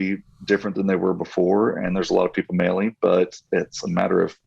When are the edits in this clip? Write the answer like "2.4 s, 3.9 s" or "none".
none